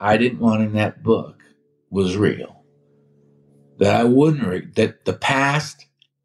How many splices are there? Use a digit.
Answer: 0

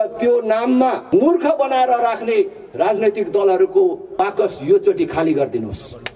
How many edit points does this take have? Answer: 2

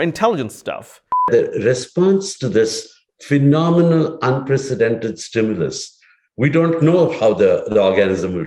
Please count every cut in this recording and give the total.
1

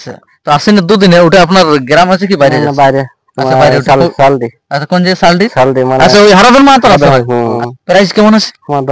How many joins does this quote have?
1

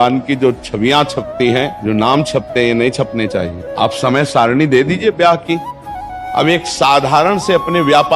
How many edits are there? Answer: 3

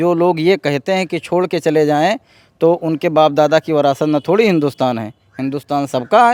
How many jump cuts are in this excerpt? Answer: 0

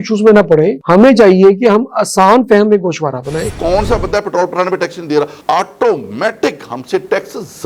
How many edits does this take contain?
1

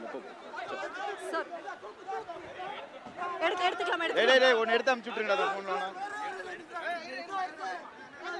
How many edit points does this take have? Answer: 0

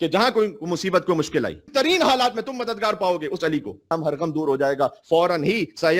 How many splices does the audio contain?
2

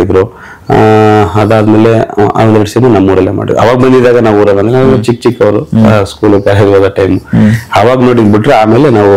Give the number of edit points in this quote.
0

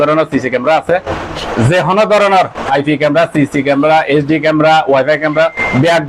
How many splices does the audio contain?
1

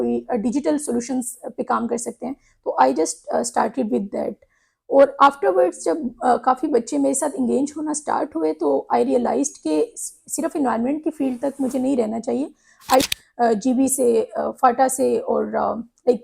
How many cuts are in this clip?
1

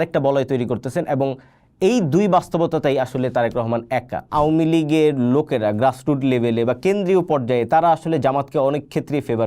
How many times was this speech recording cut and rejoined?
1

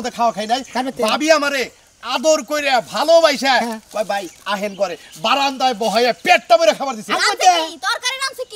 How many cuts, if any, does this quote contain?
0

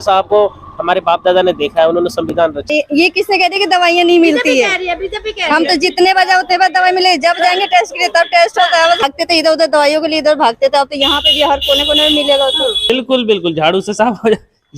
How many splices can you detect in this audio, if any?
3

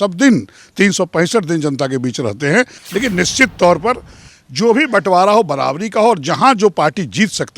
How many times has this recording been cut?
1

